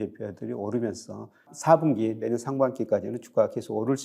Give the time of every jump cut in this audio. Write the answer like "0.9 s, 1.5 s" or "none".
1.5 s

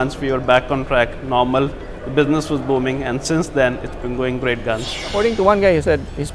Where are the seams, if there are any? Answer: none

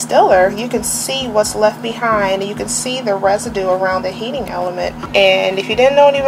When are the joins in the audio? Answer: 5.0 s

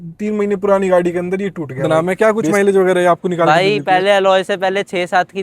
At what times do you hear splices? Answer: 1.8 s

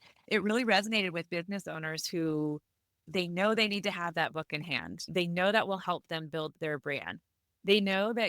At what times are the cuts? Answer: 3.1 s

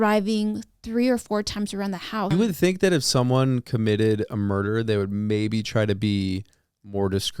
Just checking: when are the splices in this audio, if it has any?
2.3 s

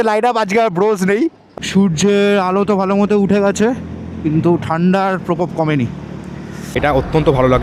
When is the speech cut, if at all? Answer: 1.4 s, 6.7 s

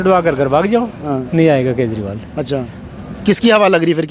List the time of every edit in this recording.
1.0 s

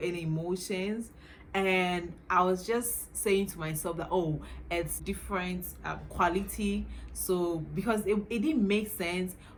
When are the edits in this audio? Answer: none

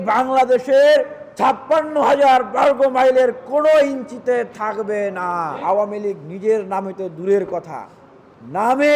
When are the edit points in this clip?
5.6 s

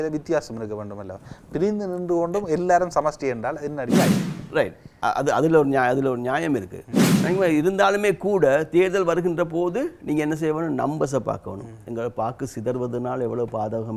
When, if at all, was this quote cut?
none

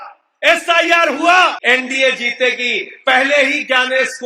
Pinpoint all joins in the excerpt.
1.6 s

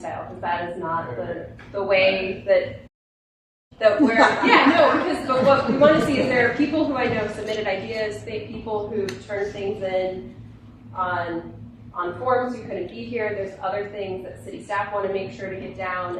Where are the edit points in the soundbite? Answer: none

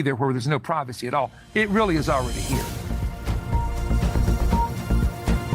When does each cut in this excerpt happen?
2.3 s

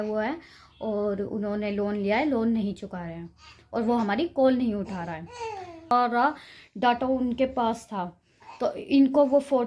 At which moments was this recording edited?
5.9 s

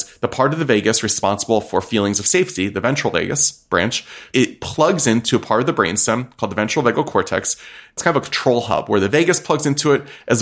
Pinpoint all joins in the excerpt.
4.2 s, 8.0 s

